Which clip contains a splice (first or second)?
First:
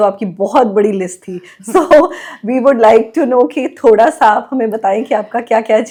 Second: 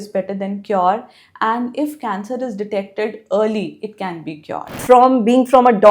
second